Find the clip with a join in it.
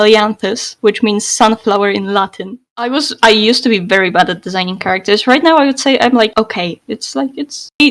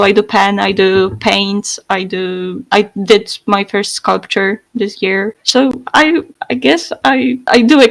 first; 1 cut; at 2.7 s

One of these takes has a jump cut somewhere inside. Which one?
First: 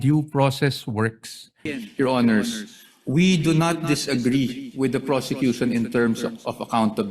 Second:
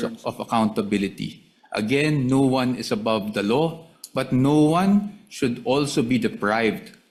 first; 1 cut; at 1.8 s

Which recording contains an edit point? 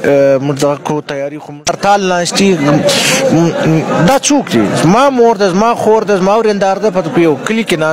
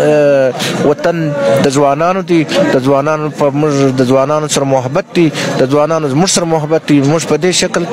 first; 1 cut; at 1.7 s

